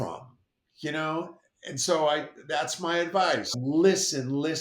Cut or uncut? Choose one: cut